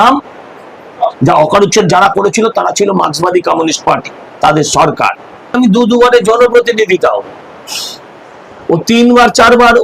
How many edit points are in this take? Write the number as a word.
one